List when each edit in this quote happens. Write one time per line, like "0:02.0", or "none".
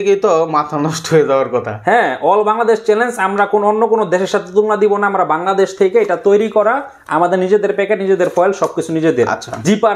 none